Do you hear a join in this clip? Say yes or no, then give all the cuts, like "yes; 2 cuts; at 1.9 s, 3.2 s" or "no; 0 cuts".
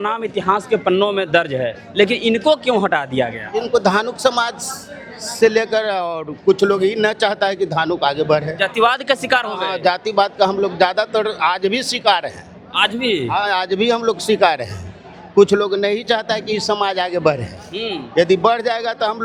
no; 0 cuts